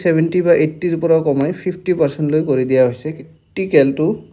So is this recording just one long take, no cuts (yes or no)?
no